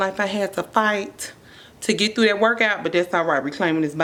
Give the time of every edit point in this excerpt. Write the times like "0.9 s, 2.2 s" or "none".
none

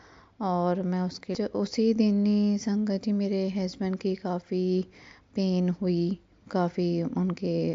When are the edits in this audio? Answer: 1.2 s

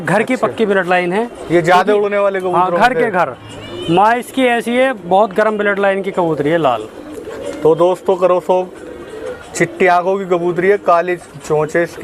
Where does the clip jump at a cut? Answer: none

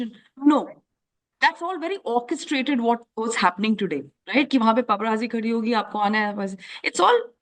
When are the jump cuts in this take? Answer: none

